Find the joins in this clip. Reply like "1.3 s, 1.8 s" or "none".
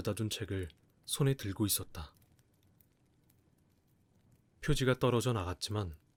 none